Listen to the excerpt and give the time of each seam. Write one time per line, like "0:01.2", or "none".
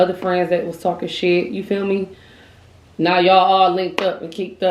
none